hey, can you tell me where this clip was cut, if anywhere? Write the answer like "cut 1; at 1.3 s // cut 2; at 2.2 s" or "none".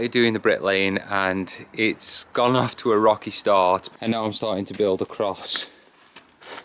cut 1; at 3.9 s

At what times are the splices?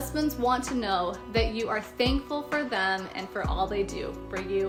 none

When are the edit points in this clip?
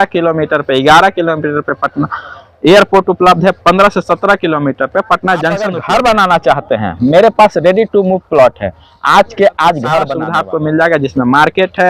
cut 1; at 5.8 s // cut 2; at 10.2 s

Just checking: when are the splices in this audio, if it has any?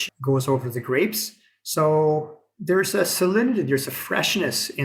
none

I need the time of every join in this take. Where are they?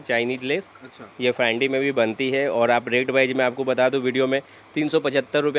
none

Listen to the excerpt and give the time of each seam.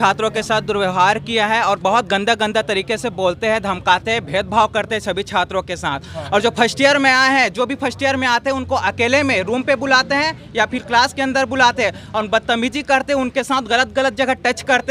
none

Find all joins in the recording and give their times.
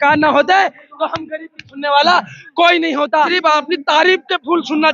cut 1; at 3.2 s

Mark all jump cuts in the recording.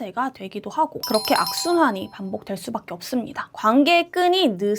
cut 1; at 1.0 s // cut 2; at 3.4 s

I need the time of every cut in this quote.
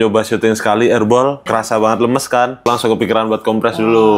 cut 1; at 1.4 s // cut 2; at 2.7 s

